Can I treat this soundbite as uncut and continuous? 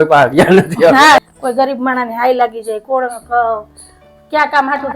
no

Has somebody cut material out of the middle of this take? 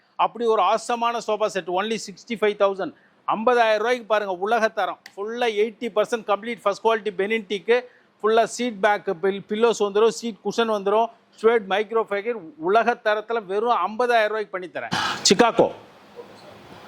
yes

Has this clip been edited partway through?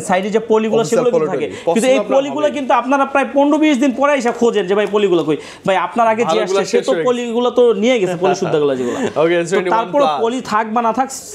no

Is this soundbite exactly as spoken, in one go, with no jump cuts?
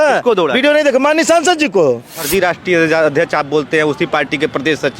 no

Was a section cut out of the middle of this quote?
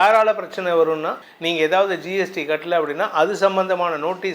yes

